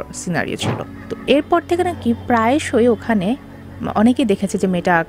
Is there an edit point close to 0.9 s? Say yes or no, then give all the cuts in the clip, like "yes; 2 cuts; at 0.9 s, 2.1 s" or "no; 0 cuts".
yes; 1 cut; at 0.9 s